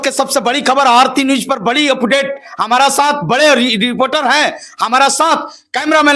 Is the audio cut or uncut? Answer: uncut